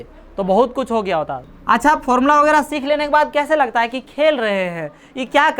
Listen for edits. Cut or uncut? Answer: cut